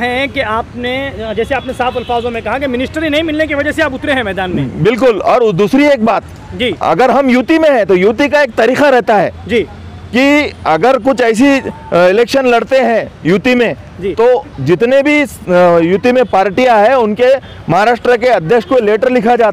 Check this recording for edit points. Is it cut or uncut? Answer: uncut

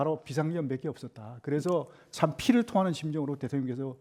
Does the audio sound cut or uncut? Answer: uncut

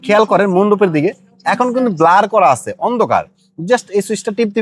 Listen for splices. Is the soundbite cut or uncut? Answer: uncut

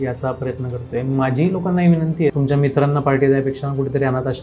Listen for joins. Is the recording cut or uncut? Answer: cut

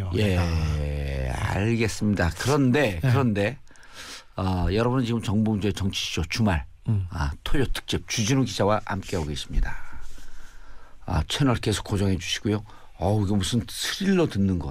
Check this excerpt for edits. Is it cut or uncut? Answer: uncut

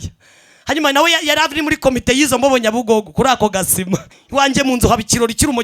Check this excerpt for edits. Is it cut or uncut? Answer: cut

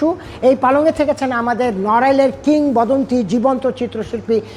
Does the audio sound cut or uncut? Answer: uncut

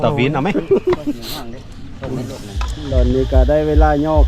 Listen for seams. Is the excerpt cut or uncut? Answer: cut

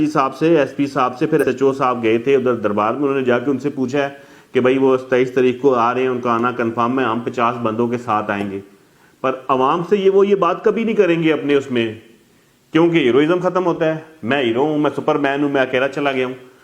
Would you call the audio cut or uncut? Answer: cut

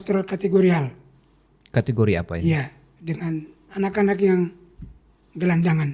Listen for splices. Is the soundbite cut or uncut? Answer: uncut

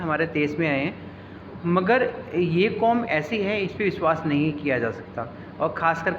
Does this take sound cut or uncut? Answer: uncut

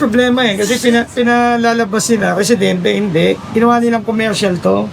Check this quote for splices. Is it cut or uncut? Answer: uncut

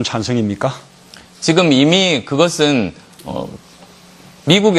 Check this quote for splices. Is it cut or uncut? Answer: cut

